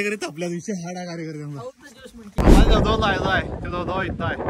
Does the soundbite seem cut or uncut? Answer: cut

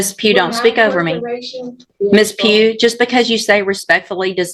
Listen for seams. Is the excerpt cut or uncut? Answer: cut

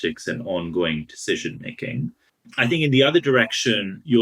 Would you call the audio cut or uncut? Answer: uncut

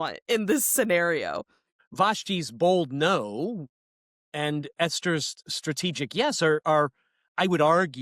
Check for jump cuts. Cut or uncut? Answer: cut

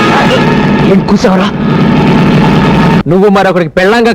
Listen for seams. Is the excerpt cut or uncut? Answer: cut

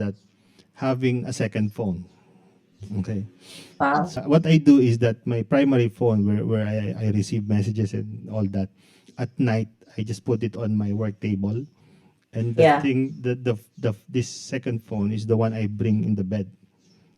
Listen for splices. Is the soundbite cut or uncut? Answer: cut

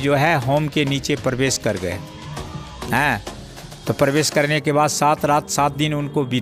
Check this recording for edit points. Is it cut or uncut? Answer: uncut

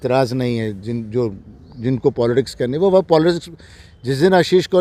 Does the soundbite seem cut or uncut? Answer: uncut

